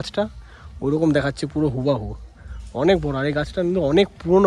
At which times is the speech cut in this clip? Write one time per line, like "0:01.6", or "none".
none